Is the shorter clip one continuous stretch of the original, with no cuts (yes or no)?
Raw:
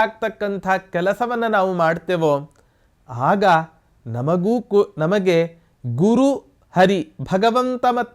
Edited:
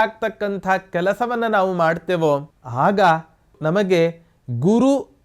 no